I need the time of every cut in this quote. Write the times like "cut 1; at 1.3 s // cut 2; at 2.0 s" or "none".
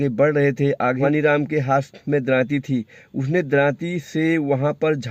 cut 1; at 1.0 s